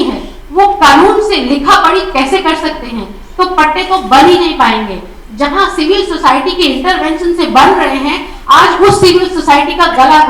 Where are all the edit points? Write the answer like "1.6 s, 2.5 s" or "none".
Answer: none